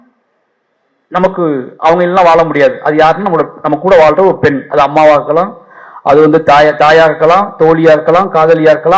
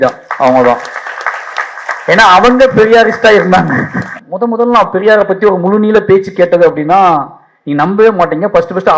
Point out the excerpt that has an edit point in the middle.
second; 1 cut; at 4.1 s

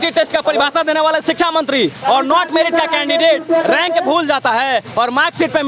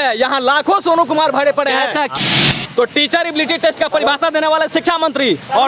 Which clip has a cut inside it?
second; 1 cut; at 2.1 s

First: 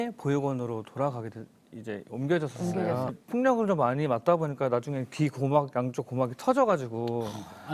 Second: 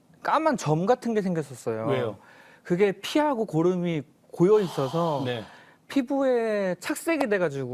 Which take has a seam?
first; 1 cut; at 3.1 s

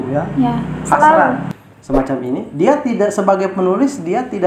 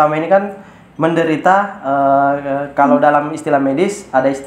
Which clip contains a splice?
first; 1 cut; at 1.5 s

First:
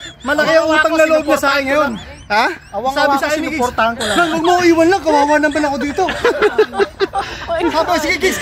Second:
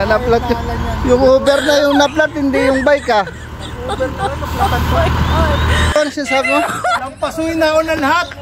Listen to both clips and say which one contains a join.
second; 1 cut; at 5.9 s

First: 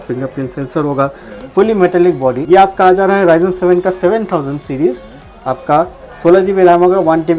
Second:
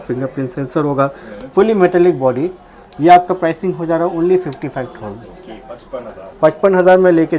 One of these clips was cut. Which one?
first; 1 cut; at 2.4 s

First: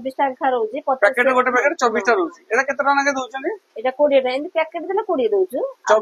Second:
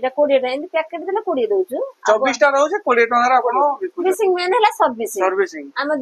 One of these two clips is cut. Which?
second; 1 cut; at 4.0 s

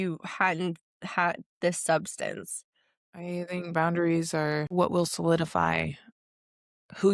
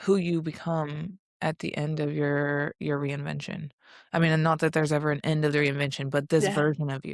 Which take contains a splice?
first; 2 cuts; at 3.0 s, 4.7 s

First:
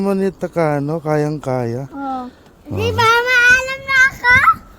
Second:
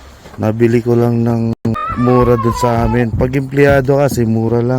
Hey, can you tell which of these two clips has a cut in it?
second; 1 cut; at 1.5 s

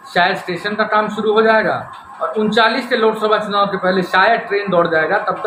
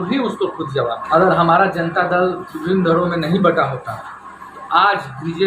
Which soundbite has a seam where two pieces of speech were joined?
second; 1 cut; at 1.0 s

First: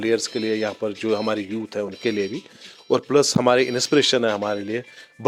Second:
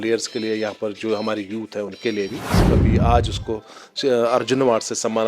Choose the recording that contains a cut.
second; 1 cut; at 2.6 s

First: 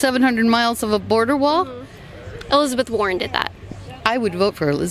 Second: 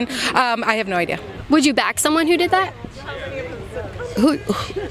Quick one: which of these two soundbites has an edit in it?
second; 1 cut; at 1.3 s

